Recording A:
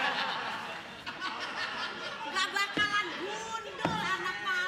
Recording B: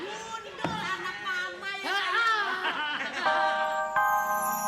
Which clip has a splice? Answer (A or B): B